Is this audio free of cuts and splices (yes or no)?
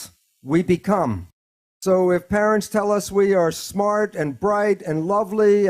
yes